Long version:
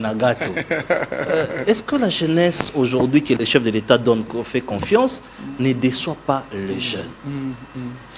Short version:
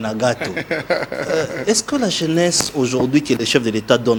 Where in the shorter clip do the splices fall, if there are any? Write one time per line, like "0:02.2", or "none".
none

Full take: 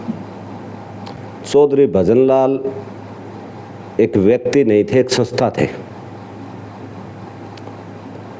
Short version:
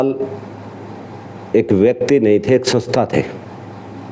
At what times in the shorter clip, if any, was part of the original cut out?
none

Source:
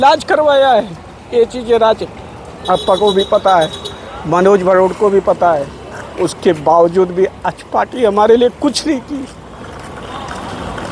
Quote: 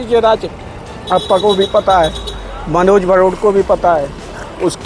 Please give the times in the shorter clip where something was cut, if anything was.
none

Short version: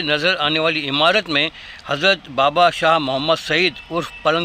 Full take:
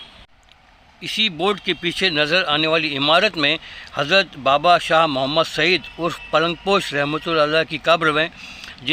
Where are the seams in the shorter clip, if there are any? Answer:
none

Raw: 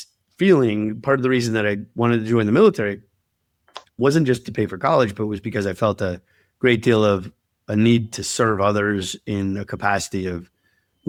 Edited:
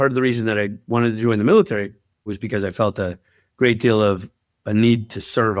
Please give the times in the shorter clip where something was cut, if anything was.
0:02.4

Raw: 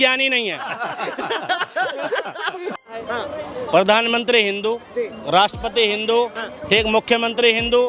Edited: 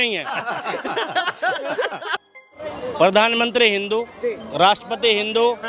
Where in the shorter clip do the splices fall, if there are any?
0:02.6

